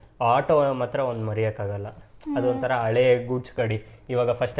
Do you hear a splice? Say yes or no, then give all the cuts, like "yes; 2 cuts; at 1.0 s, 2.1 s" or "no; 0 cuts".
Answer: no; 0 cuts